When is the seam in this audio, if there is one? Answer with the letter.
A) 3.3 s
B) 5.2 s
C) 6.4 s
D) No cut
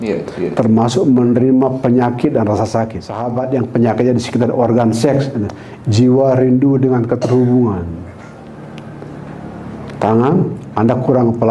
A